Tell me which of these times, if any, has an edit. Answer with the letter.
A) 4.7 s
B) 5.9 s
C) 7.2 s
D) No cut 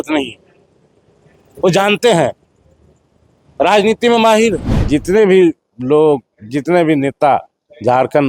A